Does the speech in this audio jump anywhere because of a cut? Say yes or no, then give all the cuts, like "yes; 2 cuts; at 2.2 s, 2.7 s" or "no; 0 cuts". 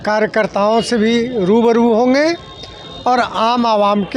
no; 0 cuts